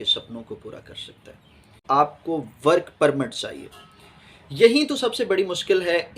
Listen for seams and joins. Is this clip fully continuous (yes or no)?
no